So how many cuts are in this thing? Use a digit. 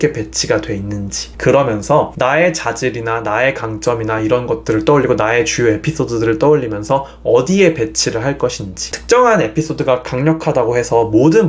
0